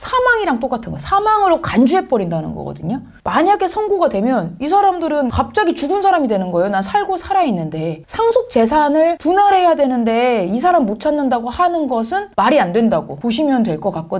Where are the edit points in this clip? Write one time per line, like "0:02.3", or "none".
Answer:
0:03.1
0:05.3
0:08.1